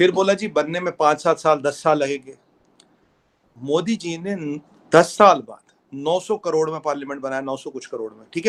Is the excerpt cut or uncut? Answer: uncut